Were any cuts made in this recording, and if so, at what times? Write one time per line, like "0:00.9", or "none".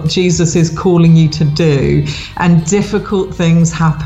none